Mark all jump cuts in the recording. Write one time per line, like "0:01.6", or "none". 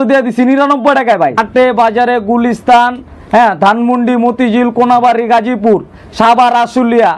0:01.3